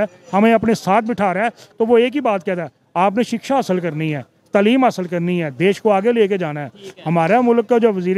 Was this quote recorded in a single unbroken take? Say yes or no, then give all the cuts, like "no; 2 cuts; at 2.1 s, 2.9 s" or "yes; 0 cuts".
yes; 0 cuts